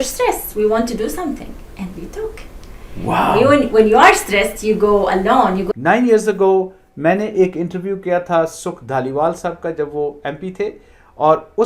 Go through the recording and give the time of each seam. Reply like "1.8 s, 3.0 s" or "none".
5.7 s